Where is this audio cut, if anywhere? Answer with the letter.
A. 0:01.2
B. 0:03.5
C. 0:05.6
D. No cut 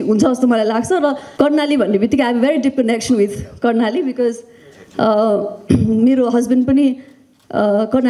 A